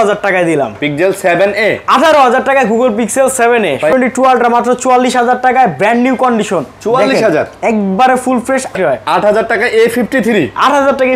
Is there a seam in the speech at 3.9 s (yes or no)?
yes